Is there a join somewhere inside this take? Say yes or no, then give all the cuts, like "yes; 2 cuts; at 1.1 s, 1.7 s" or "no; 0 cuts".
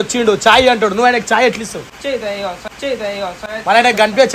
no; 0 cuts